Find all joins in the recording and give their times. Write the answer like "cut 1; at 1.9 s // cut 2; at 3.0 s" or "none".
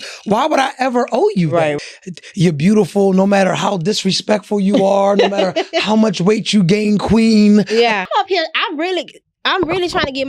cut 1; at 1.8 s // cut 2; at 8.0 s